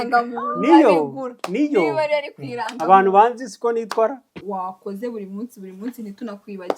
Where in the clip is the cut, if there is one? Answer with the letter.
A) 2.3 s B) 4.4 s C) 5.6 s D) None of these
B